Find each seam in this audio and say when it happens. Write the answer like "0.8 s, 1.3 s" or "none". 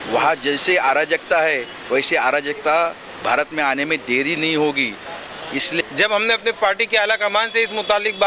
5.8 s